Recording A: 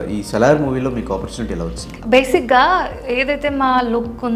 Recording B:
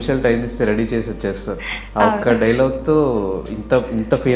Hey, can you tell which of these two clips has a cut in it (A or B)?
A